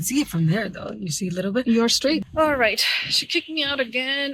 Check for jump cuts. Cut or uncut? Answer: cut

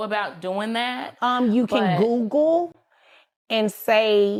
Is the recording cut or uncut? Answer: uncut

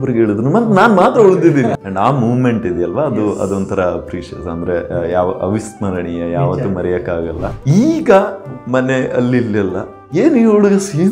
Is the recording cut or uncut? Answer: cut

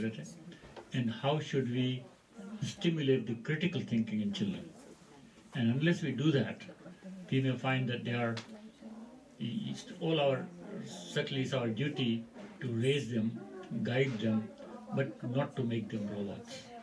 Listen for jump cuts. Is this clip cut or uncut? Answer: uncut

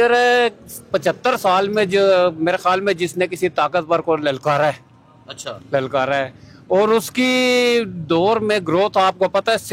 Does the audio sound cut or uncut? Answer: uncut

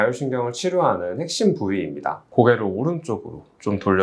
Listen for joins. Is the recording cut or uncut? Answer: cut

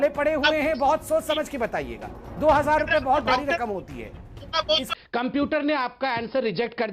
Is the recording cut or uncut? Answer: cut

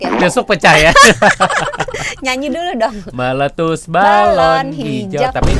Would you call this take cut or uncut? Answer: uncut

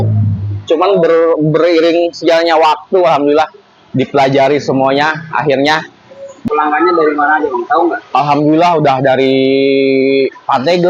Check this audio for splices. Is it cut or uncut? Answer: cut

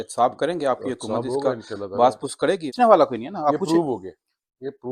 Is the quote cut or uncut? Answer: cut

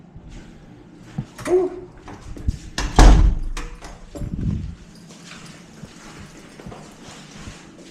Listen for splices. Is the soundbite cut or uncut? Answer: uncut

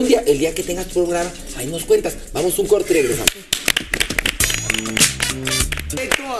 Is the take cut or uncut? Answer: cut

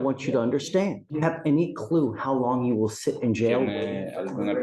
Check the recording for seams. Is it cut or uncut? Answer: cut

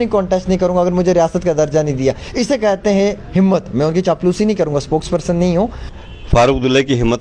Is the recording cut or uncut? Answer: cut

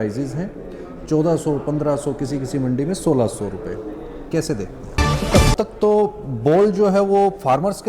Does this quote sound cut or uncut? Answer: cut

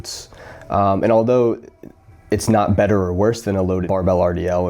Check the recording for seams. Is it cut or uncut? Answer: uncut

